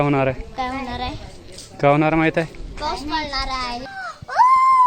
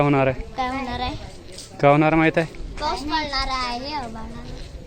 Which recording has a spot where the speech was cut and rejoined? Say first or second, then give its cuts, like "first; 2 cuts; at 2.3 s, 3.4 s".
first; 1 cut; at 3.9 s